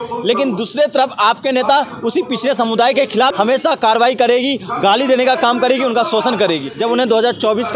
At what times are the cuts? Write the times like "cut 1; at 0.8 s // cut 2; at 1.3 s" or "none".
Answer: cut 1; at 3.3 s // cut 2; at 6.7 s

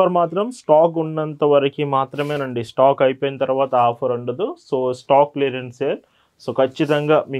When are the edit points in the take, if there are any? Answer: none

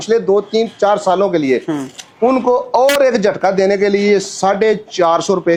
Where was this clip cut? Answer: none

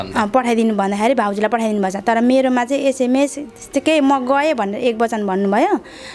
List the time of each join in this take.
none

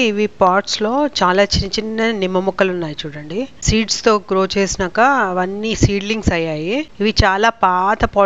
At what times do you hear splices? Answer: none

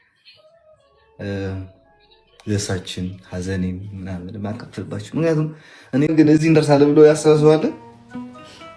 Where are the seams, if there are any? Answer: cut 1; at 6.1 s

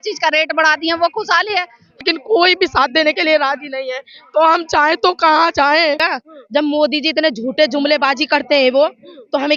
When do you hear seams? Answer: cut 1; at 2.0 s // cut 2; at 6.0 s

